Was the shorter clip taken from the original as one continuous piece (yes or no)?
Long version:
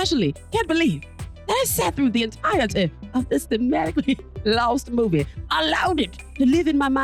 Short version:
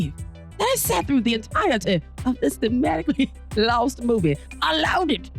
yes